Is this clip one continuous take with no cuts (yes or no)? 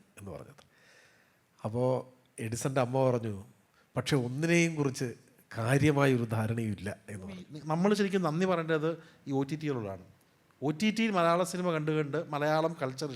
no